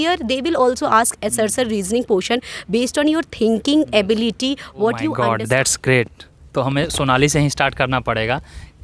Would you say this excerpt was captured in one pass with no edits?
no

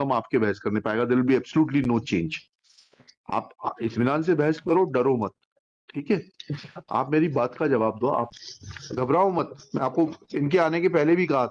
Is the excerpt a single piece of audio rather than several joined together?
no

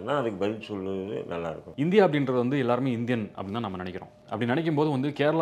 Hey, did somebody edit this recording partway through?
yes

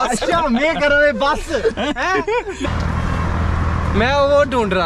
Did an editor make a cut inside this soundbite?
no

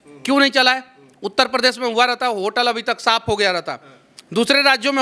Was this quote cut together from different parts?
no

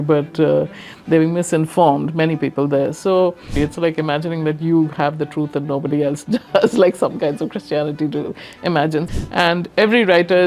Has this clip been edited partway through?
yes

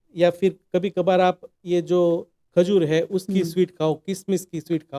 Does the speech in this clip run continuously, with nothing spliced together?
yes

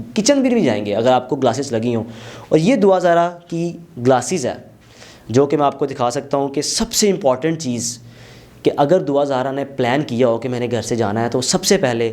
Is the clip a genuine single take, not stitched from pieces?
yes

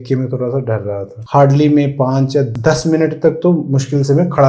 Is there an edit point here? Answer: yes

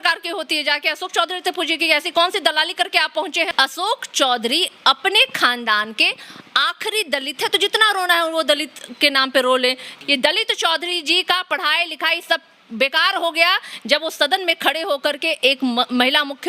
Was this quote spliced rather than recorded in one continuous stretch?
yes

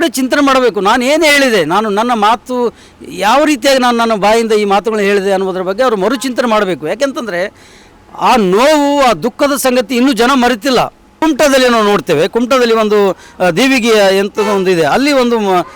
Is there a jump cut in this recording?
yes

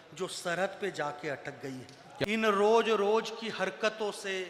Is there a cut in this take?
yes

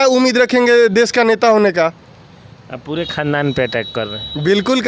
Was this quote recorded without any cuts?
yes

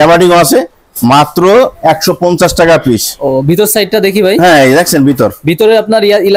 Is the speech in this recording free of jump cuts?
yes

